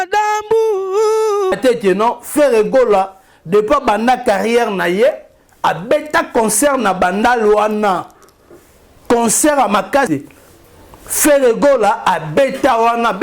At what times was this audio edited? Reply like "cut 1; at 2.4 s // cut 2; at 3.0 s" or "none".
cut 1; at 1.6 s // cut 2; at 10.1 s